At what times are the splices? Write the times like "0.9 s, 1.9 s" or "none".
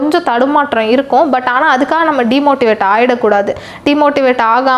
none